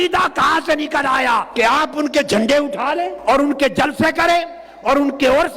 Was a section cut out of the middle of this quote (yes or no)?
yes